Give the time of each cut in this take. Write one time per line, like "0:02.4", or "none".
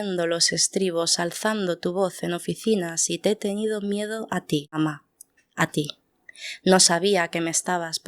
0:04.8